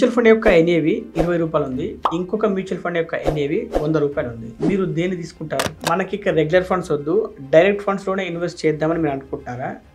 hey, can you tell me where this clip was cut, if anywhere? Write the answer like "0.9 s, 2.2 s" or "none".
5.8 s